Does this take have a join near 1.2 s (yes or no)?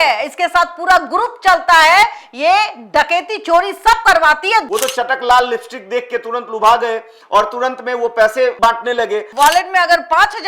no